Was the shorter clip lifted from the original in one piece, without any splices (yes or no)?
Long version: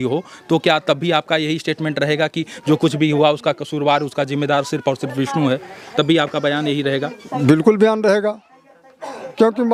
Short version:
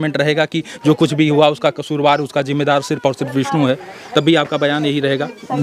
yes